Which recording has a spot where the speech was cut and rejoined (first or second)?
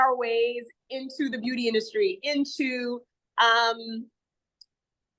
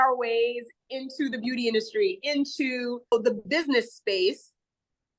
second